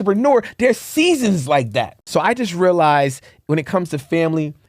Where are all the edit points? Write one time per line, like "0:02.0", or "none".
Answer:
0:02.0